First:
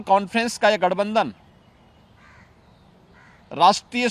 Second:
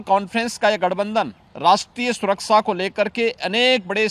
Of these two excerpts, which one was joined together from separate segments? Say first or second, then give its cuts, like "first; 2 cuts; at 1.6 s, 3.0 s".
second; 1 cut; at 1.4 s